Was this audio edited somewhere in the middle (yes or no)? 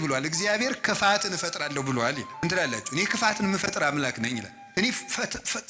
yes